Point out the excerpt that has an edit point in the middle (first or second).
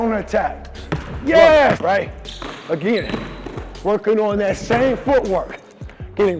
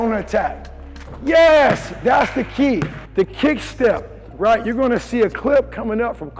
first